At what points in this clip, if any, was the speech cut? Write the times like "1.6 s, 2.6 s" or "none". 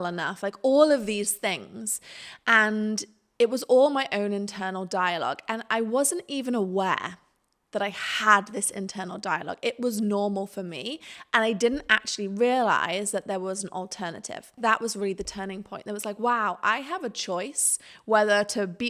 14.5 s